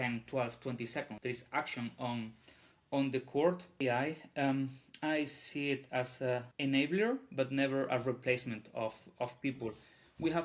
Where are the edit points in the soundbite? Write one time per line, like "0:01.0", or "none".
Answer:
0:01.1
0:03.8
0:06.5